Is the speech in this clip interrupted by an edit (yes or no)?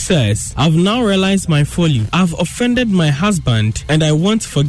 no